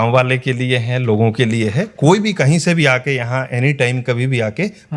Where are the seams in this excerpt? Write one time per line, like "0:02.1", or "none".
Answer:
none